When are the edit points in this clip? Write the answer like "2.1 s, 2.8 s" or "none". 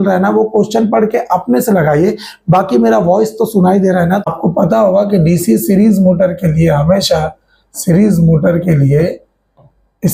4.2 s